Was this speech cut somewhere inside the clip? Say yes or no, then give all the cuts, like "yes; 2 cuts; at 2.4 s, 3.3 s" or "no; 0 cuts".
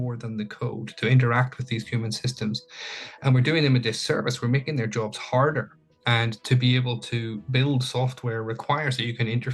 yes; 1 cut; at 6.0 s